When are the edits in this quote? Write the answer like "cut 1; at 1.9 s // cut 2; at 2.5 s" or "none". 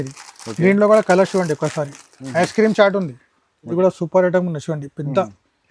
cut 1; at 3.7 s